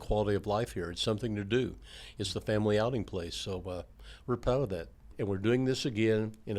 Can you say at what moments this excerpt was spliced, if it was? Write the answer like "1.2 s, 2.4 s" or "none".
5.1 s